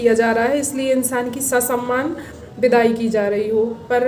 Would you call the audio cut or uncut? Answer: uncut